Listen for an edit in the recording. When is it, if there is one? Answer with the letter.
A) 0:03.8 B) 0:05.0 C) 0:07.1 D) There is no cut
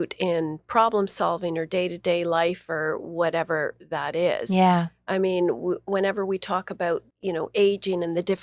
C